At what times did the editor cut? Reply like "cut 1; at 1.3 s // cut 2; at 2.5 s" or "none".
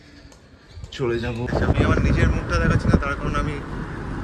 cut 1; at 1.4 s